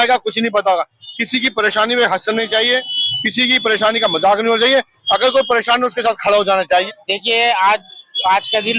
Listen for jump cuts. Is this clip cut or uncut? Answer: cut